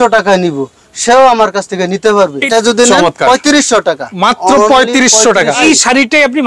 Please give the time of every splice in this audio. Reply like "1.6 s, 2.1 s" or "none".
2.4 s, 5.6 s